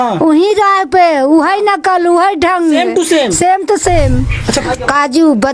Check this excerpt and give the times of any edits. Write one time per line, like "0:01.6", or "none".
0:04.6